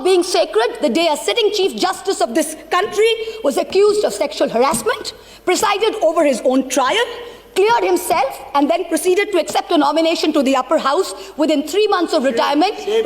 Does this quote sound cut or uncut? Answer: uncut